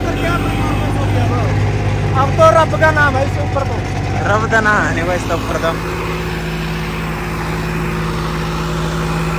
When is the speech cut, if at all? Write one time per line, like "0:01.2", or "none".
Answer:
none

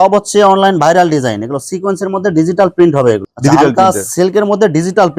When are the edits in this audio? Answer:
0:03.3

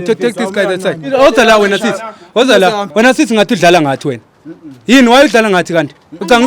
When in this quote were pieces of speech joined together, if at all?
0:01.1
0:02.8

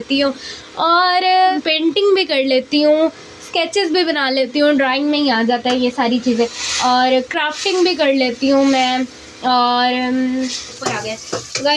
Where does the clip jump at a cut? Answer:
0:01.9
0:10.7

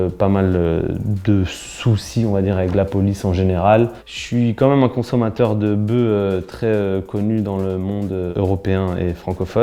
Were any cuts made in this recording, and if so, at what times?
none

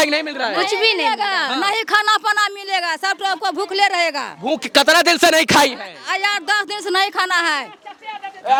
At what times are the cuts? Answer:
none

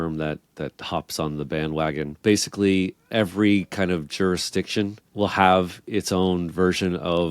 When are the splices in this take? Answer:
0:02.2
0:05.0

